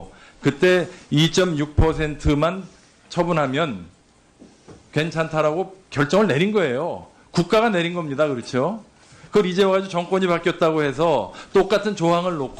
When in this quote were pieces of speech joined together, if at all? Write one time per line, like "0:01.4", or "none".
0:06.3

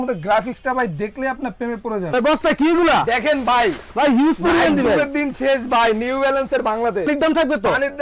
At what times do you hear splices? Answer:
0:02.1
0:07.1

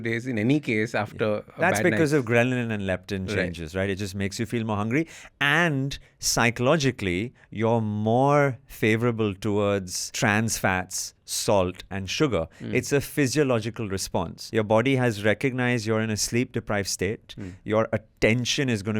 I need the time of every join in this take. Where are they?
0:10.0
0:14.4

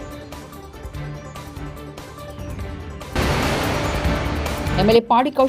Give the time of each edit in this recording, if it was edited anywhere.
none

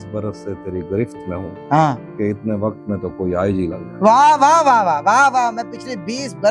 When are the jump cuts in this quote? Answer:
none

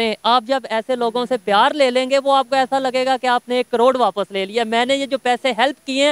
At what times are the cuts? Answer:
none

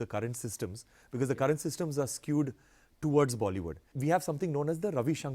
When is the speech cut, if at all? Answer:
0:03.9

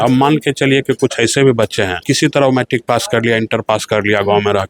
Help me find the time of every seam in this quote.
0:02.0

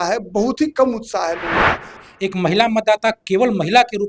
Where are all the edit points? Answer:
0:01.9

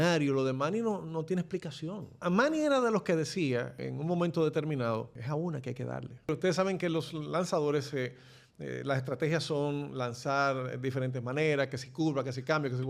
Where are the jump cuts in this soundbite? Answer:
0:02.2
0:03.8
0:05.2
0:06.3

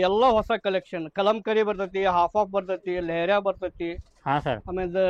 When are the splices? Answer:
none

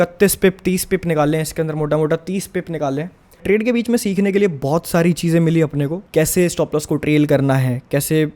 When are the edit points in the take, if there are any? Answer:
0:03.4
0:06.0

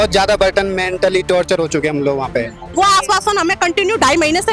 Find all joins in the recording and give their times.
0:02.7

